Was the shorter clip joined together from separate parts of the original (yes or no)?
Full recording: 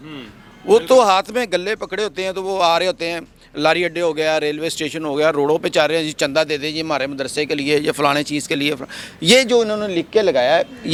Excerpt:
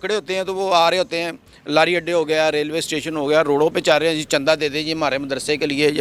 no